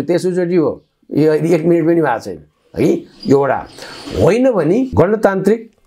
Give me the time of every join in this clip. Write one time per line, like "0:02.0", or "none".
0:04.9